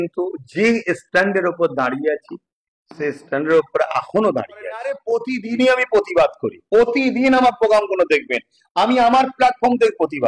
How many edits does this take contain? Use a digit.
1